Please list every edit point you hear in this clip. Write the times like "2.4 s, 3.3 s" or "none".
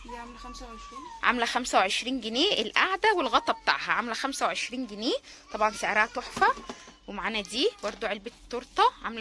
none